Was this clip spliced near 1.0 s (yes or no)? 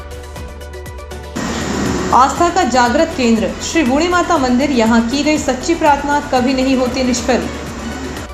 yes